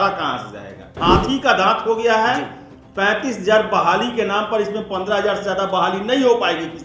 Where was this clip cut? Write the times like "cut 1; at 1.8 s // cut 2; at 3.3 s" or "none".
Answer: cut 1; at 1.0 s

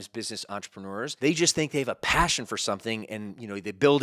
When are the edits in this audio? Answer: cut 1; at 1.1 s

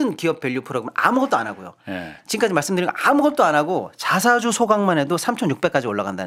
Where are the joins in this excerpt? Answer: none

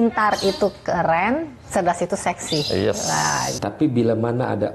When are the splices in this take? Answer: cut 1; at 3.5 s

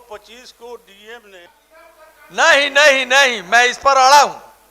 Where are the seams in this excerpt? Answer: cut 1; at 1.4 s

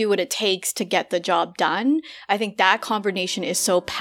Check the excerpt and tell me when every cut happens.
none

